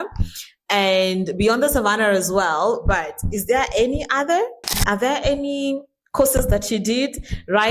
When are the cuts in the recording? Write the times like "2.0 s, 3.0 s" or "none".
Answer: 4.8 s